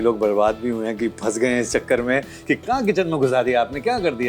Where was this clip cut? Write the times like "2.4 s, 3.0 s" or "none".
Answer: none